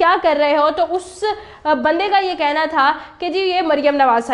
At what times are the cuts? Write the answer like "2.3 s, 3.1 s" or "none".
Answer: none

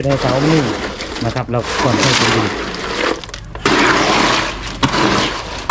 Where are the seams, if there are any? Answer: none

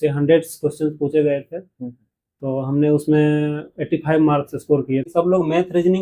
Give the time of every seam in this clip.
5.1 s

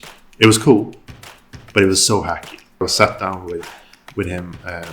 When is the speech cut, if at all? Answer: 2.8 s

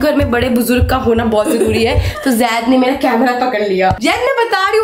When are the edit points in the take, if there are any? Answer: none

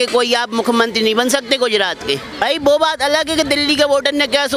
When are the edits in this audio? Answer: none

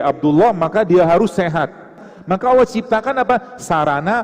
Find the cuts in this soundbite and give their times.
2.1 s

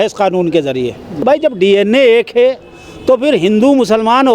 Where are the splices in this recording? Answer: 1.1 s

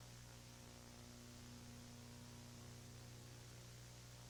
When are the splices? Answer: none

